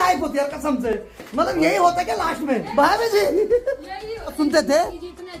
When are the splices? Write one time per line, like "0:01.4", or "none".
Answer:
none